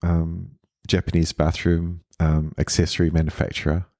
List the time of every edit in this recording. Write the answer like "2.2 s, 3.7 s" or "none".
2.0 s